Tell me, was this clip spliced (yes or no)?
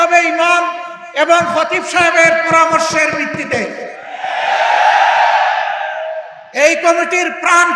no